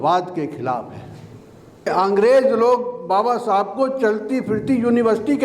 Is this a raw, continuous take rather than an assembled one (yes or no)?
no